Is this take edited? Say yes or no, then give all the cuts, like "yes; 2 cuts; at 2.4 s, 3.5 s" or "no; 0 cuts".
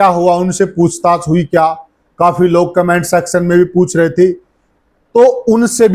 no; 0 cuts